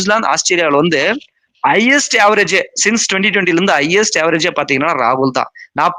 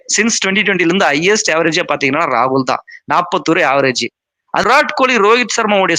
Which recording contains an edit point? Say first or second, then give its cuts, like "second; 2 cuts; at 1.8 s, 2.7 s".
second; 1 cut; at 4.6 s